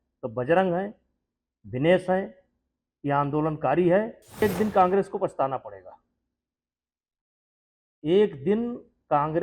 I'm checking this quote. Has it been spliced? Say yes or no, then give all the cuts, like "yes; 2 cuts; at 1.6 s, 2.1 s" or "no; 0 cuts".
yes; 1 cut; at 4.4 s